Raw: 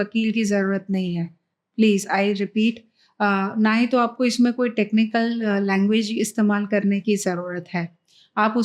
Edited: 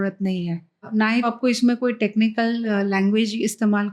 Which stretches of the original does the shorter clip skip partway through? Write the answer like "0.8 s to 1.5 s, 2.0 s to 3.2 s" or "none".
1.8 s to 3.9 s